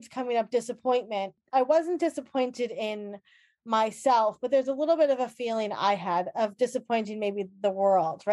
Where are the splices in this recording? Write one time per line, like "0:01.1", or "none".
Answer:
0:01.4